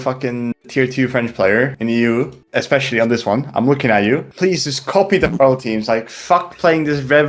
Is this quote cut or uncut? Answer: uncut